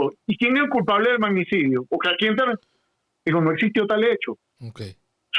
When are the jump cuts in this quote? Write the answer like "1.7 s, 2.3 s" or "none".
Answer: none

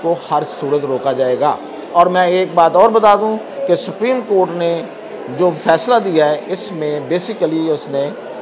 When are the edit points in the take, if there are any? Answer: none

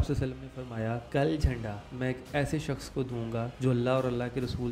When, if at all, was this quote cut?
1.0 s, 1.8 s

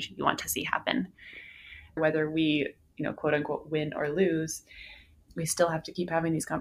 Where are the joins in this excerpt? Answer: 2.0 s, 5.2 s

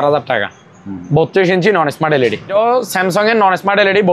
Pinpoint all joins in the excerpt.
2.5 s

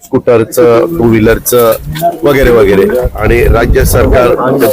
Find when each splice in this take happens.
3.0 s

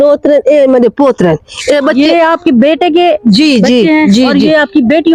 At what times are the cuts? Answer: none

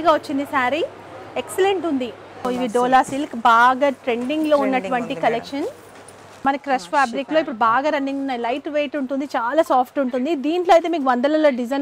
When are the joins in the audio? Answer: 2.5 s, 6.3 s

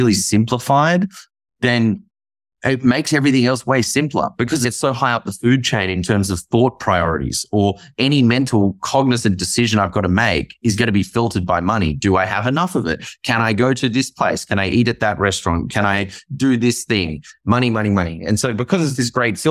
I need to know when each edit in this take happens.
4.6 s

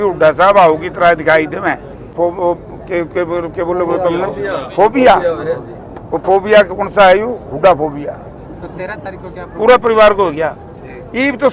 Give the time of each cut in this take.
2.1 s

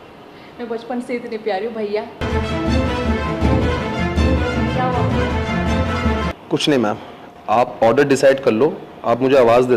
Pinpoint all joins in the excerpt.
none

